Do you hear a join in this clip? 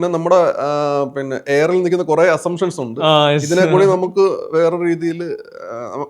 no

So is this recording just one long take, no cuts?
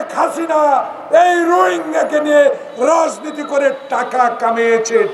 yes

